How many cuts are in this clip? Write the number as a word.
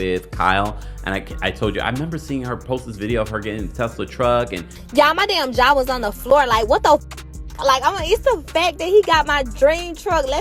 zero